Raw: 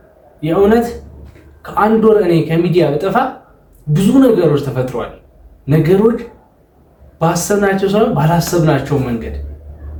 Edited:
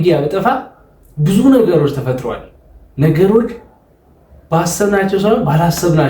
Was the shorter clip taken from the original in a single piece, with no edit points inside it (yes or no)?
yes